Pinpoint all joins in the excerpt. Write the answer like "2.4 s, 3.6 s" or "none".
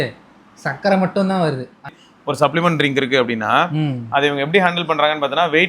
1.9 s